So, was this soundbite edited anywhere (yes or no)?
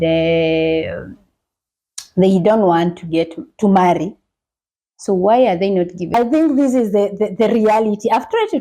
yes